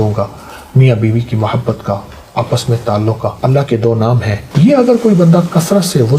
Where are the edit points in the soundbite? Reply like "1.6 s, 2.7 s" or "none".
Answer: 3.4 s, 4.4 s